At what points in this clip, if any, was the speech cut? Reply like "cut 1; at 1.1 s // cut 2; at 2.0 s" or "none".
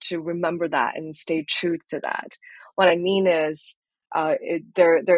none